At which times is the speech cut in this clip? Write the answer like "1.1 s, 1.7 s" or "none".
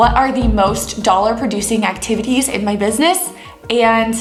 none